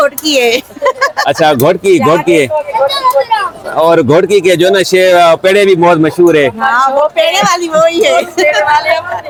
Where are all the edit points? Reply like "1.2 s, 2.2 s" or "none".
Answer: none